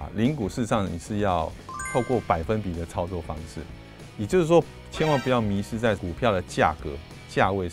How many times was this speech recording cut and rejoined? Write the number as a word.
one